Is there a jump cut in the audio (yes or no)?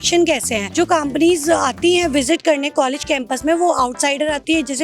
no